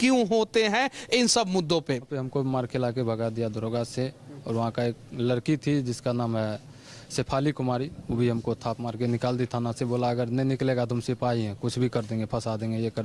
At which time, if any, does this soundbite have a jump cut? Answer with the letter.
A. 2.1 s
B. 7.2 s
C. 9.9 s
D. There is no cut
A